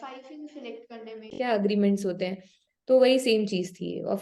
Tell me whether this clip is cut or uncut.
cut